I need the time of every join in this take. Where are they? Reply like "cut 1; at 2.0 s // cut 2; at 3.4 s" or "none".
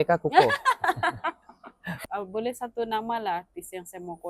cut 1; at 2.0 s